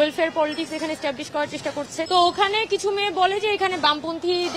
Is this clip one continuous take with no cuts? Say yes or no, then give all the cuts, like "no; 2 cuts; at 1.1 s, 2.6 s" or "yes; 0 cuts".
no; 1 cut; at 2.1 s